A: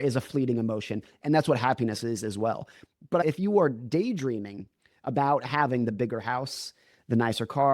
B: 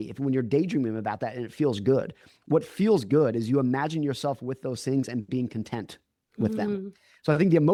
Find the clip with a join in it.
A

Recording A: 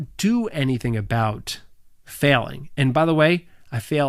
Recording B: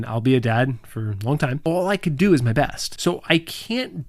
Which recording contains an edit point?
B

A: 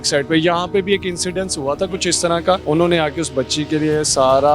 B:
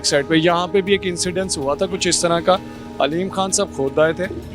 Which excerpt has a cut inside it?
A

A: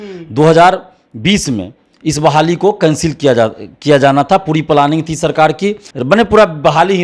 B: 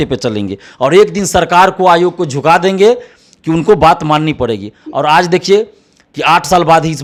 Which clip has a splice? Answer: A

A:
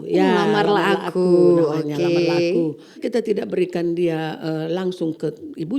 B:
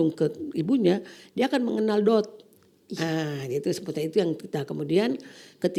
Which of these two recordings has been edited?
A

